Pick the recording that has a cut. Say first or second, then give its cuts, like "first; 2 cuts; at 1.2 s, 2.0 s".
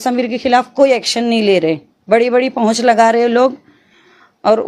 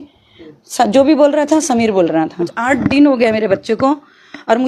second; 1 cut; at 2.6 s